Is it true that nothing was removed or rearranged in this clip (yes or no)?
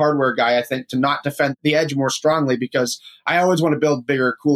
no